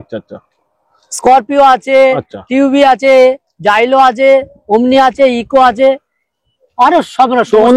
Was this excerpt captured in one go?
yes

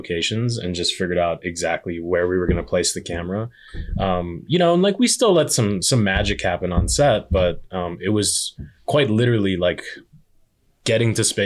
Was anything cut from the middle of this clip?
no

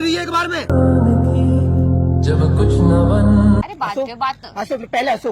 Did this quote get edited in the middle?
yes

